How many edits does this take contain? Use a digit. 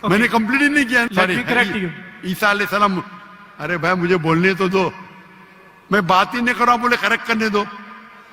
1